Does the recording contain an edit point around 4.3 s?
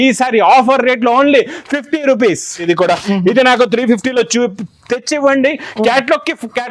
no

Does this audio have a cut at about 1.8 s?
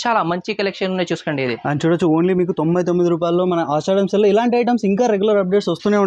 no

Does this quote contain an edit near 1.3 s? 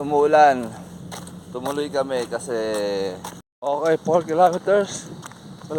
no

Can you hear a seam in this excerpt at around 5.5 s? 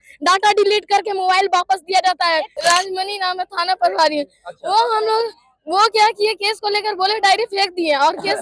no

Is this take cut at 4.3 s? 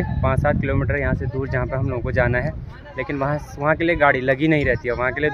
no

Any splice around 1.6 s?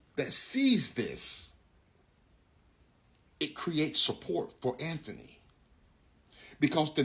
no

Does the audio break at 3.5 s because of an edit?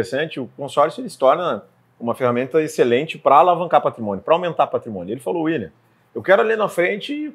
no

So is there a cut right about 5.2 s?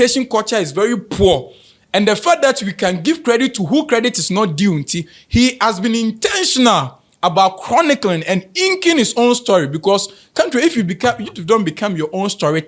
no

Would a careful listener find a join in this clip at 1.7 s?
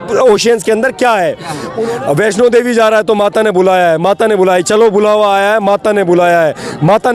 yes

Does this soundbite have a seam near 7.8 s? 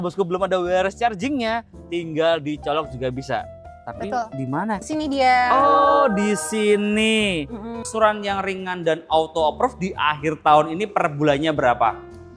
yes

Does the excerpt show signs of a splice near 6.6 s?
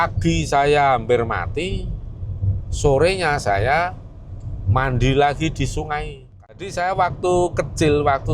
yes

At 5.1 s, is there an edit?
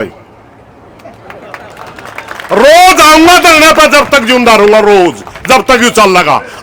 no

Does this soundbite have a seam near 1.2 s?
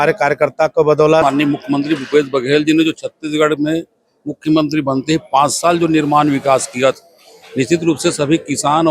yes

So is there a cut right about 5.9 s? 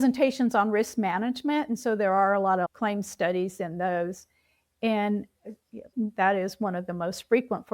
yes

